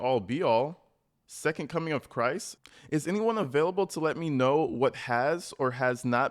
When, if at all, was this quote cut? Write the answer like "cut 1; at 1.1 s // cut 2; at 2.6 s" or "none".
cut 1; at 2.6 s